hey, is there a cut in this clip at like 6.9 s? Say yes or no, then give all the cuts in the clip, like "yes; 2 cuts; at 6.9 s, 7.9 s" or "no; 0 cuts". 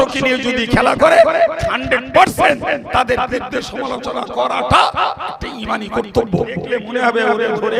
yes; 1 cut; at 6.9 s